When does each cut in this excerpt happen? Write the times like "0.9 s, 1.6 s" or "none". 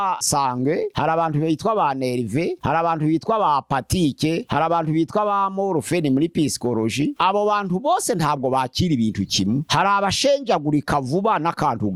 none